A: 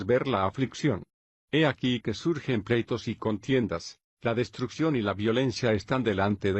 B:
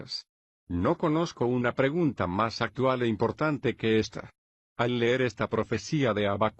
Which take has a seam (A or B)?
B